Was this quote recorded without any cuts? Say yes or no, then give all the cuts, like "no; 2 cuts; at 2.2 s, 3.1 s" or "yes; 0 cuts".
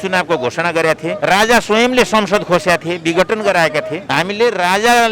no; 2 cuts; at 1.2 s, 4.0 s